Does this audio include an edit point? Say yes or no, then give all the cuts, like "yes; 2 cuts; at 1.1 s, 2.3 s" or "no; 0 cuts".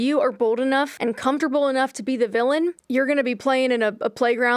yes; 2 cuts; at 0.9 s, 2.8 s